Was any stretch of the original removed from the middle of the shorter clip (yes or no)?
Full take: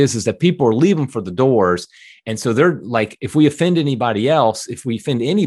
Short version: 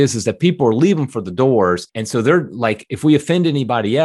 yes